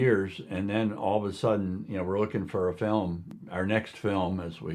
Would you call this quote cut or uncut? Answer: cut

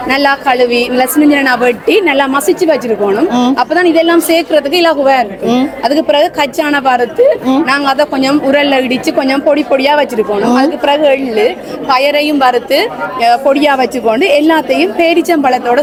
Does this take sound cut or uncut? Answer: uncut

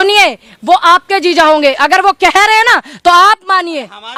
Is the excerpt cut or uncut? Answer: uncut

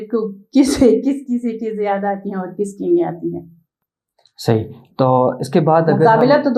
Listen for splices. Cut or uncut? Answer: uncut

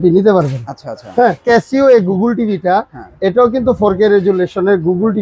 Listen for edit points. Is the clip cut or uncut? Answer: cut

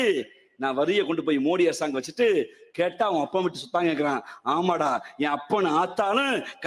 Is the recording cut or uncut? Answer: uncut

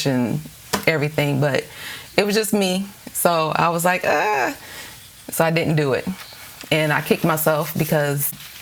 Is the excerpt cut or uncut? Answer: uncut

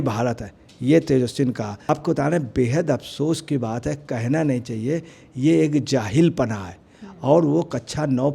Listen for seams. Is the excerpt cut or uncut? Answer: cut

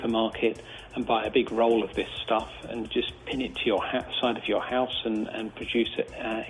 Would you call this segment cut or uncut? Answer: uncut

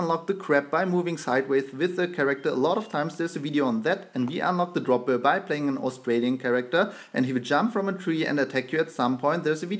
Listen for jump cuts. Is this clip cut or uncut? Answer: uncut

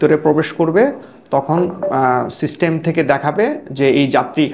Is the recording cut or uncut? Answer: uncut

